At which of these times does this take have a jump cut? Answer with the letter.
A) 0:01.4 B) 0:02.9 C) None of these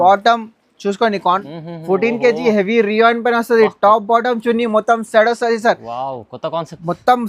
A